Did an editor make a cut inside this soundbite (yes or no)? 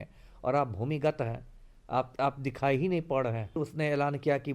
yes